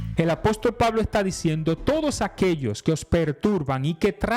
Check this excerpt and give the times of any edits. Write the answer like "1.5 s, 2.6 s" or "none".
none